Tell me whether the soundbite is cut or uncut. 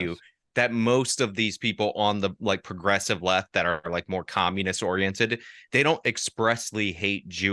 uncut